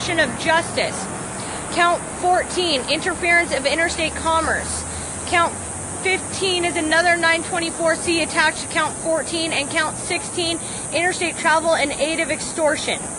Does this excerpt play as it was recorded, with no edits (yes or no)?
yes